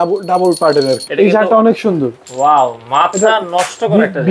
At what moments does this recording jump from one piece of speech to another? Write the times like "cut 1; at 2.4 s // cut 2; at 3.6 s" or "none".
cut 1; at 1.1 s